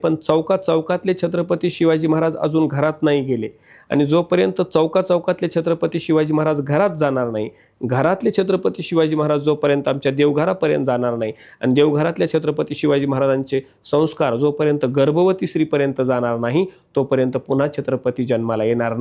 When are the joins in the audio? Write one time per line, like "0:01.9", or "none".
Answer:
none